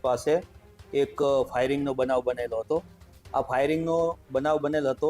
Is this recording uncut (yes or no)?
yes